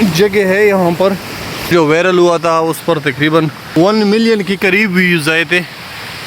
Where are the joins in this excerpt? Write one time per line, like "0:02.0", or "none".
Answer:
0:01.7
0:03.6